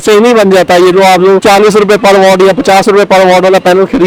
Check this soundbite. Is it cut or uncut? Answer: uncut